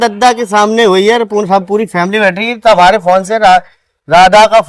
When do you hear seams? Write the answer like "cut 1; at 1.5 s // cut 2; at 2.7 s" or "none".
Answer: none